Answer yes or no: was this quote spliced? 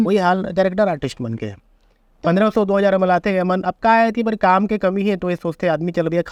no